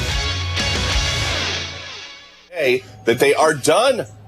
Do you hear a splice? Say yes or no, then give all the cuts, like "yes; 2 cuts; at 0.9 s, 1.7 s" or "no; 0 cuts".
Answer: yes; 1 cut; at 2.6 s